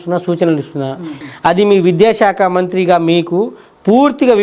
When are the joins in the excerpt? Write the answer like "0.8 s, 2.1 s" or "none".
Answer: 1.2 s